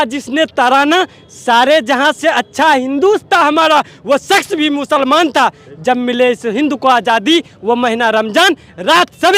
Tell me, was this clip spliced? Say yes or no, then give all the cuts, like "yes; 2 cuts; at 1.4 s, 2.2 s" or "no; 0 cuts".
no; 0 cuts